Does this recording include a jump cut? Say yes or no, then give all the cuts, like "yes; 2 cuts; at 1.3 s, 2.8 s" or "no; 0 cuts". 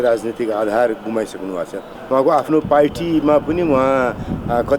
yes; 1 cut; at 1.9 s